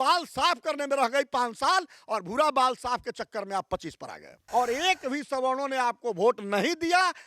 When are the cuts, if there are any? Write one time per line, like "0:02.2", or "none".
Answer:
0:04.4